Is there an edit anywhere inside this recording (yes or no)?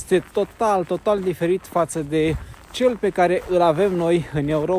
no